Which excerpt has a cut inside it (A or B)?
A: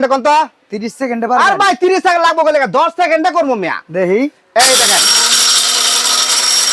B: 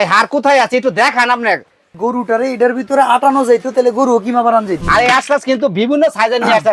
B